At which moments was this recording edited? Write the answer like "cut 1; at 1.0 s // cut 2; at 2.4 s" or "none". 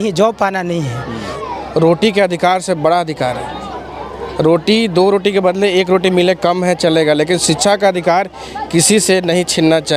cut 1; at 1.3 s